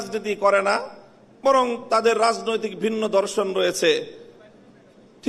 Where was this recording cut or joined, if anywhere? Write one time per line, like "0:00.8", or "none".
none